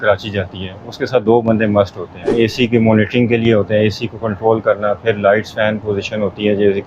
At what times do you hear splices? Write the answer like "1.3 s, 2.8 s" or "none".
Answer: 2.3 s